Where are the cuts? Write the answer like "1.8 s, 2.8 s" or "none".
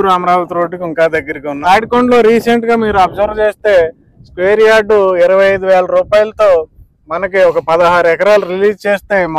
1.4 s